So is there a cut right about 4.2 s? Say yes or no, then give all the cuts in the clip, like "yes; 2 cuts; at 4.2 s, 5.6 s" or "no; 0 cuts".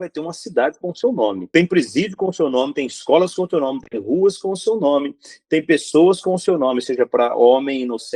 no; 1 cut; at 1.4 s